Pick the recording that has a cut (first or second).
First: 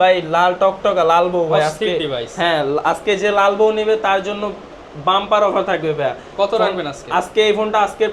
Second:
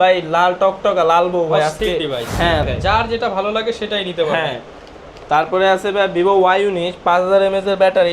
second